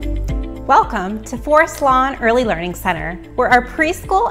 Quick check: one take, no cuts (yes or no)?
yes